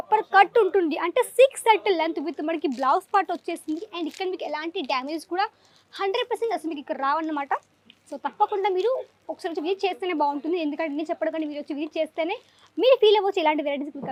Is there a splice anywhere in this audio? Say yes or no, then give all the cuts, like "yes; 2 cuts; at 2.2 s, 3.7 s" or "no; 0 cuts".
no; 0 cuts